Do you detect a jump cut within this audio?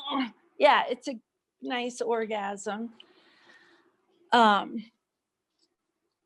no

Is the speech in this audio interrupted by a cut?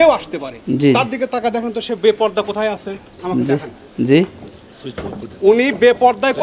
no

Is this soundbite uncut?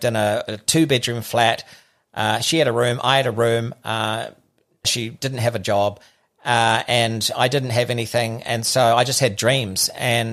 yes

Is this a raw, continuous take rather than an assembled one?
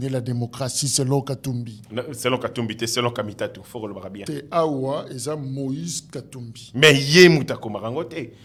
yes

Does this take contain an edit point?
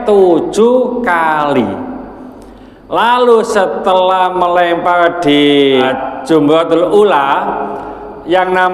yes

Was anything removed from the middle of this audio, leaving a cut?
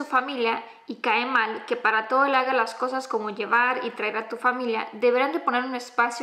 no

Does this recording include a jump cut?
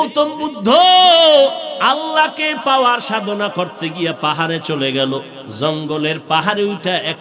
yes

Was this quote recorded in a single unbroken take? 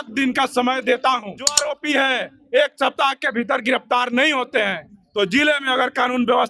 no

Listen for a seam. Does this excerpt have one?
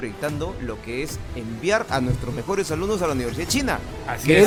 no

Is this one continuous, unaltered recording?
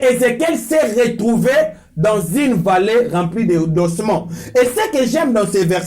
yes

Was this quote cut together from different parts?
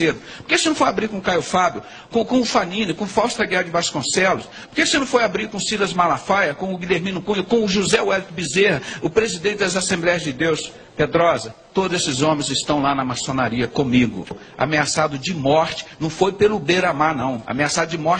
yes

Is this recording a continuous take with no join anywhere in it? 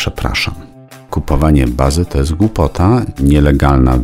no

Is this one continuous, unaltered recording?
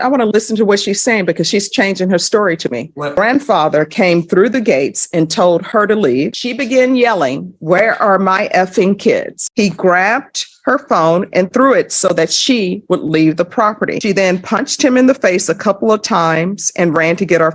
no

